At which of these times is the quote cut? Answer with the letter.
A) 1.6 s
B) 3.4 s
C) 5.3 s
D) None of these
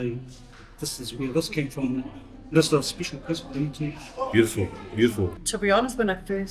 C